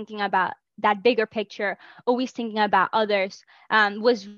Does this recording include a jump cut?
no; 0 cuts

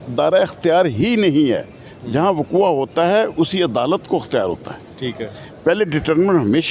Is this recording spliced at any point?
no; 0 cuts

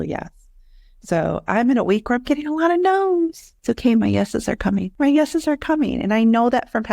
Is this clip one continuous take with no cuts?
no; 2 cuts; at 3.5 s, 4.9 s

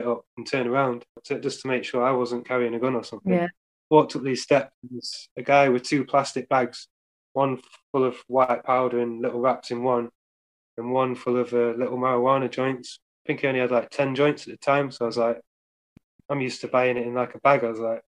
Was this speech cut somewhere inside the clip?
yes; 1 cut; at 1.2 s

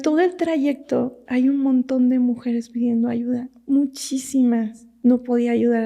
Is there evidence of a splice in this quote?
yes; 1 cut; at 4.8 s

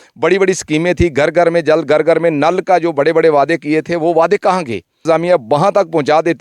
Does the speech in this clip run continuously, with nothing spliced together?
no; 1 cut; at 5.0 s

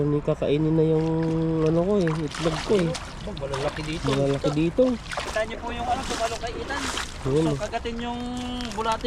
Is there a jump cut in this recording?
yes; 1 cut; at 5.3 s

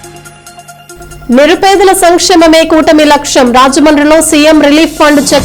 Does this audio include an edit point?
yes; 1 cut; at 1.0 s

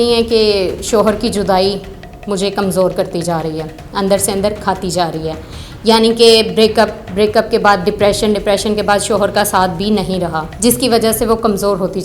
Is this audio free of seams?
no; 1 cut; at 10.4 s

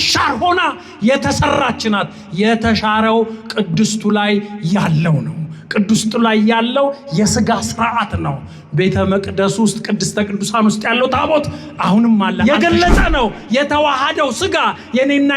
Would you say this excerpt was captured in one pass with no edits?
no; 1 cut; at 12.4 s

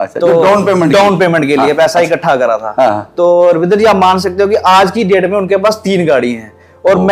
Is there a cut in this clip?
no; 0 cuts

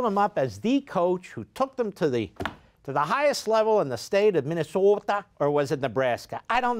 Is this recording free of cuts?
yes; 0 cuts

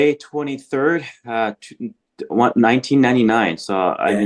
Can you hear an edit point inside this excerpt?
no; 0 cuts

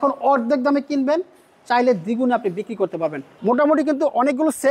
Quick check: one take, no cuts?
no; 1 cut; at 3.3 s

